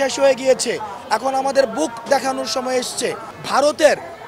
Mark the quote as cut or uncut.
cut